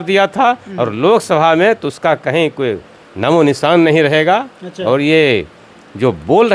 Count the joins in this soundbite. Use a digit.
0